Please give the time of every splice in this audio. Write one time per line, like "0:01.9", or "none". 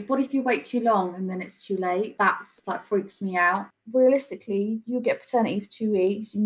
0:02.1
0:03.7

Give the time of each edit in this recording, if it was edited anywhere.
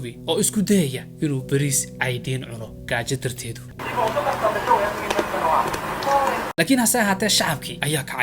0:03.7
0:06.5

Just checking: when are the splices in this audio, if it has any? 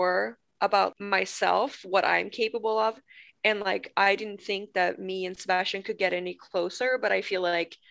0:00.9

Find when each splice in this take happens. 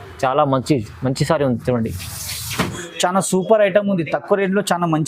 0:02.8

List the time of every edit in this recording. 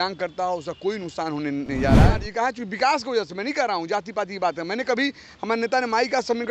0:02.2

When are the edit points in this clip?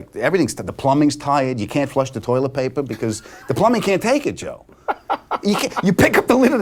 none

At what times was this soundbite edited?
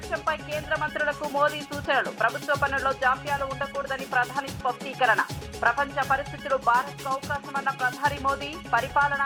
none

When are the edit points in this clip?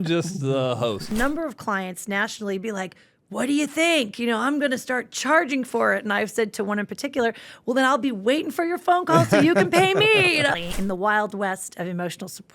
0:01.1
0:10.6

